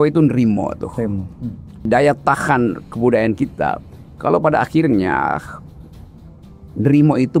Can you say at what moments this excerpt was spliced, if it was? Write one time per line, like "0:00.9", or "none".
0:01.8